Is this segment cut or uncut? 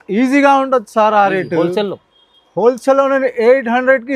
uncut